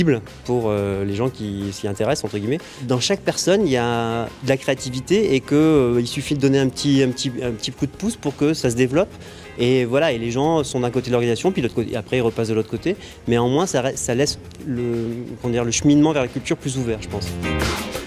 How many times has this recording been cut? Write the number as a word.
one